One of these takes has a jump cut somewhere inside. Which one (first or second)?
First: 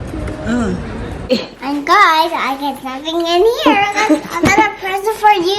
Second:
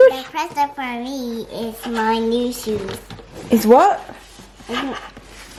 first